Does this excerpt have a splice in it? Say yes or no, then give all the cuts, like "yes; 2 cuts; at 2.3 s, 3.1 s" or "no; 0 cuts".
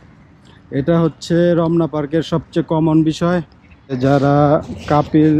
yes; 1 cut; at 4.0 s